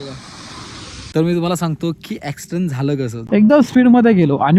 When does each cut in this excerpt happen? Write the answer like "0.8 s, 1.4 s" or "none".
1.1 s, 3.2 s